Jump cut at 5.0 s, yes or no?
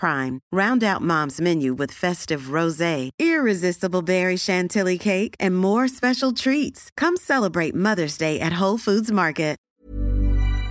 no